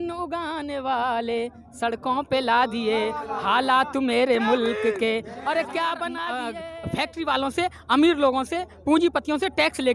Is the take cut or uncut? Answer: cut